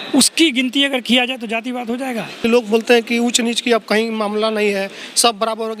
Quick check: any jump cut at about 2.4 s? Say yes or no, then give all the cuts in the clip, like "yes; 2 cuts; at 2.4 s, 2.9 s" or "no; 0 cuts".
yes; 1 cut; at 2.4 s